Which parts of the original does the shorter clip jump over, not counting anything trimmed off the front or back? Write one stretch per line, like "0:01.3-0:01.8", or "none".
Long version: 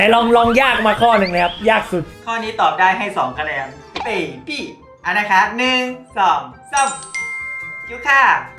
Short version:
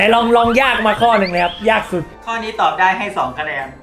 none